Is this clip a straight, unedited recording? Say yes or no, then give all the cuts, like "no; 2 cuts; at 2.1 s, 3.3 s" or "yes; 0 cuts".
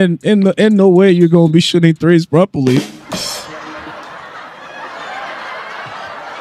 yes; 0 cuts